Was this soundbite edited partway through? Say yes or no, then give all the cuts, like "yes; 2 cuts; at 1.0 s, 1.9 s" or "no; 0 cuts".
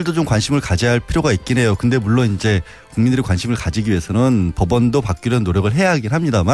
no; 0 cuts